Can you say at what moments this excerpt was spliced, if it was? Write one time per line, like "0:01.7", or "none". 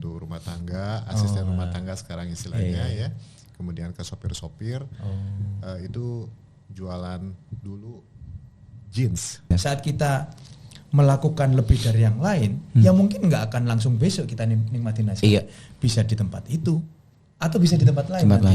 0:09.5